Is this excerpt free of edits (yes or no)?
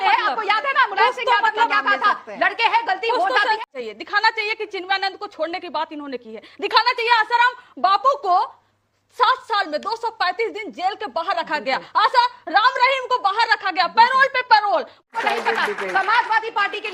no